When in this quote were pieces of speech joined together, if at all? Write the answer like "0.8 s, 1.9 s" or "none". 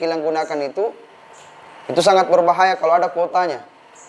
none